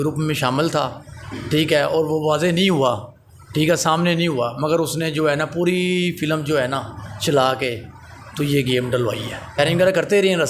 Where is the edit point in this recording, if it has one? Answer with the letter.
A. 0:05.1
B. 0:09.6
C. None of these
B